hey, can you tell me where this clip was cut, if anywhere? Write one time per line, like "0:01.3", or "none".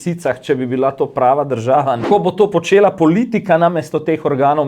0:02.0